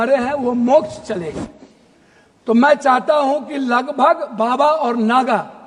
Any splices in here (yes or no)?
no